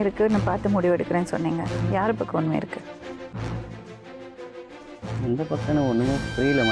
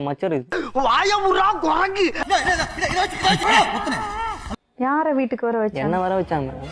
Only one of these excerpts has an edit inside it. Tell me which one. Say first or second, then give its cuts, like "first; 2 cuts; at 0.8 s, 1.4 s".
second; 1 cut; at 4.4 s